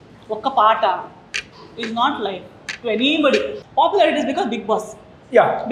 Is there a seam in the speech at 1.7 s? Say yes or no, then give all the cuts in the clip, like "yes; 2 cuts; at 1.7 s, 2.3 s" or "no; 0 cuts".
no; 1 cut; at 3.6 s